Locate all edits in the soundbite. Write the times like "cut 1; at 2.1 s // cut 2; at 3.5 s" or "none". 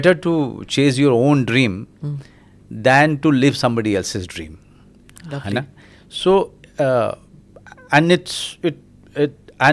none